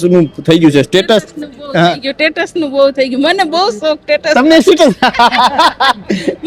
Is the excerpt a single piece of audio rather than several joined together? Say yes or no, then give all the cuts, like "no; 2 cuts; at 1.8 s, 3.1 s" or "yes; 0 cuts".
yes; 0 cuts